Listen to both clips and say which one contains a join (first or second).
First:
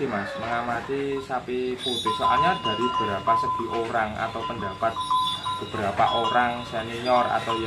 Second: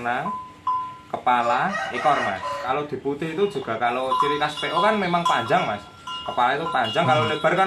second